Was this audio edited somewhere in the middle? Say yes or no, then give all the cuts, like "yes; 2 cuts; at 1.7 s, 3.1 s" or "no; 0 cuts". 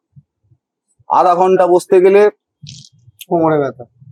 no; 0 cuts